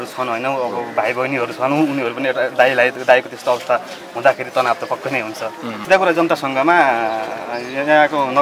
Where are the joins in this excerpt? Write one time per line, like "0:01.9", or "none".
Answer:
0:05.8

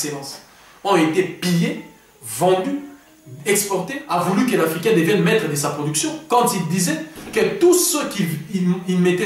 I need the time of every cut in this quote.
0:04.0

